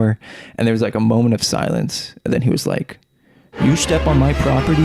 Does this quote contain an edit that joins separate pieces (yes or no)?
no